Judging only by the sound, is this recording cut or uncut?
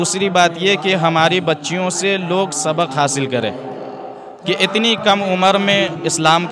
uncut